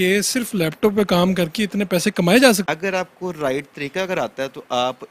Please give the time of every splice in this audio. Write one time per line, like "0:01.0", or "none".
0:02.6